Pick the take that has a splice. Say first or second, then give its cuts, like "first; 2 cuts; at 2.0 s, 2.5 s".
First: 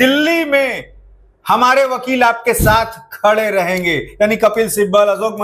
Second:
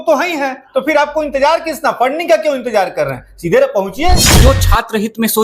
second; 1 cut; at 4.3 s